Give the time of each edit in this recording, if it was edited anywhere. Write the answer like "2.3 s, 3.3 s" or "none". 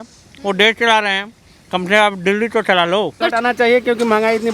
3.2 s